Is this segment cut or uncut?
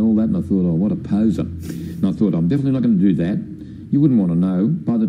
uncut